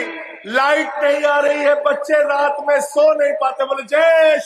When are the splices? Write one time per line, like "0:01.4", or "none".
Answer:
none